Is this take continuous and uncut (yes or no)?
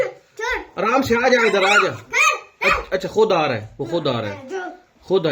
yes